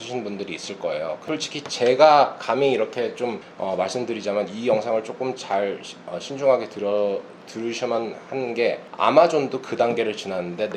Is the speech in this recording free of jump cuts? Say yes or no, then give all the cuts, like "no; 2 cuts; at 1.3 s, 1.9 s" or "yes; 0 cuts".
no; 2 cuts; at 1.2 s, 3.5 s